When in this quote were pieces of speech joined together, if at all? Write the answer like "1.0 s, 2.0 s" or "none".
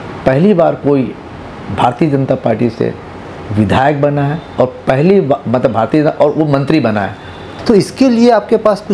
7.5 s